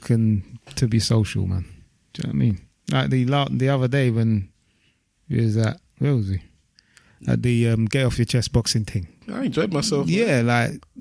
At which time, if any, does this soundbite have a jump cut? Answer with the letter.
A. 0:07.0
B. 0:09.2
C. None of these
B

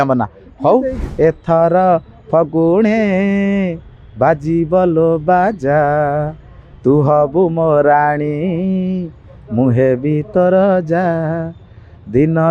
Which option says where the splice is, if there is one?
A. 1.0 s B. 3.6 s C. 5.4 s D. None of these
A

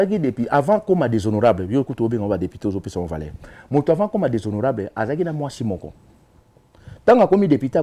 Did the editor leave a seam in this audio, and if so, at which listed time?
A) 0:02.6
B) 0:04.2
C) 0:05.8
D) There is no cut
D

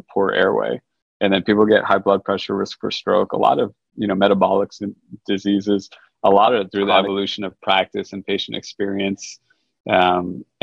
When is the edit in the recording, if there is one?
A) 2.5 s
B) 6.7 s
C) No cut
B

